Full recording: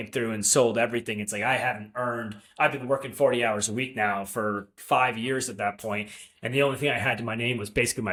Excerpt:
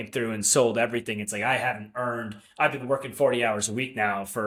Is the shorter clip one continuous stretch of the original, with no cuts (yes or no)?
yes